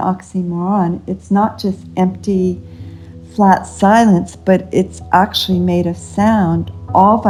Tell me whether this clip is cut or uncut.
uncut